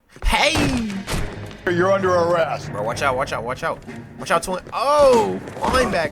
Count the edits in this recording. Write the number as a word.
one